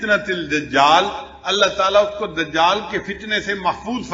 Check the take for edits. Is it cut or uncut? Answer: uncut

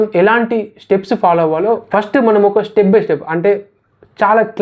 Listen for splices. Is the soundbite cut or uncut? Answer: cut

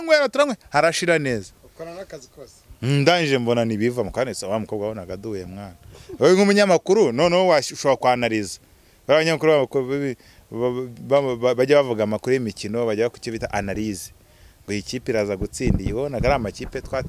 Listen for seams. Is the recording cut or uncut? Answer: uncut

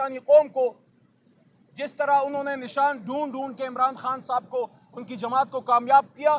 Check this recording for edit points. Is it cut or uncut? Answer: uncut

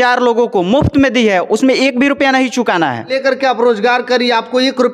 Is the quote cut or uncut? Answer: cut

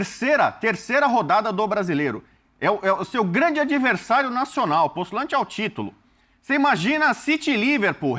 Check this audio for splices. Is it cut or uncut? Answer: uncut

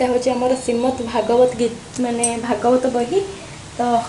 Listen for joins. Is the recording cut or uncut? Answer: uncut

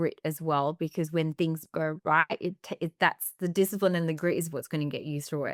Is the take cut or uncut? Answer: uncut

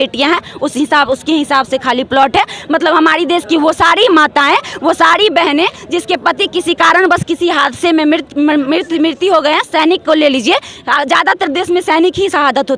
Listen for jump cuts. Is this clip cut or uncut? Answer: uncut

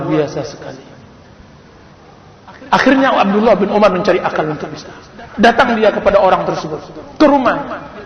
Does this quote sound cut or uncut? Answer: uncut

